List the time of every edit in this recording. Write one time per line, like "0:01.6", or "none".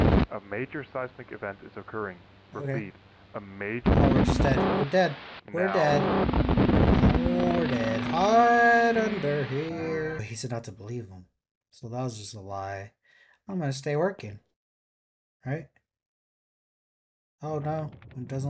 0:10.2